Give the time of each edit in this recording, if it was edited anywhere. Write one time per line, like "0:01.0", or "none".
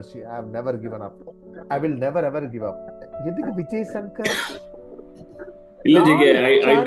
0:03.0